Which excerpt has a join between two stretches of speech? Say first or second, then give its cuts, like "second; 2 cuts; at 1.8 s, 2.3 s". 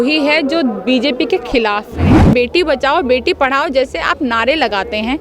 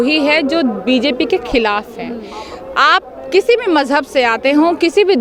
first; 1 cut; at 2.0 s